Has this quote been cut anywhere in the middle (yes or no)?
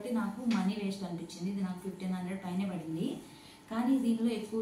no